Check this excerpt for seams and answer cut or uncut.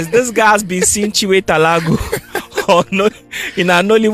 uncut